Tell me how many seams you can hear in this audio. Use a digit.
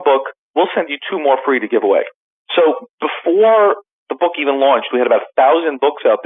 0